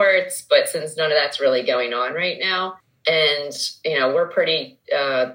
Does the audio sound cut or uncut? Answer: cut